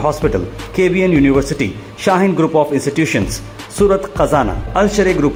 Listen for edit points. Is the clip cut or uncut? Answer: uncut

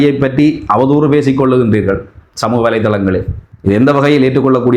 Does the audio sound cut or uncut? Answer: cut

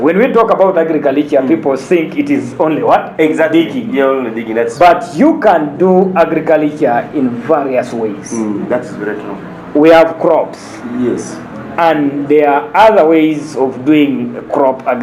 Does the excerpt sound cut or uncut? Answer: uncut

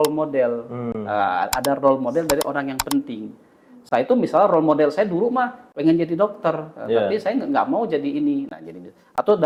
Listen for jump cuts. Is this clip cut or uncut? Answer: uncut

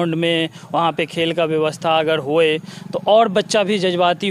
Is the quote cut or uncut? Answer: uncut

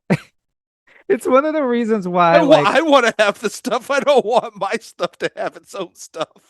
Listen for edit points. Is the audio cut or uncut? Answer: uncut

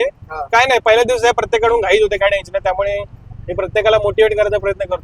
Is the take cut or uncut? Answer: uncut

